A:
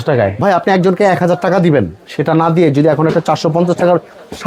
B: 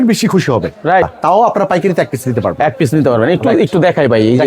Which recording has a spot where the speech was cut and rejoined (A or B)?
B